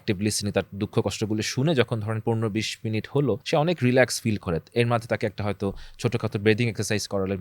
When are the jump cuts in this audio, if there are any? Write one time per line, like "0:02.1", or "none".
0:03.4